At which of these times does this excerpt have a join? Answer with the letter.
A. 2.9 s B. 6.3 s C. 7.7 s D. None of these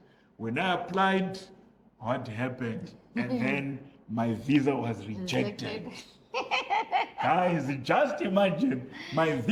D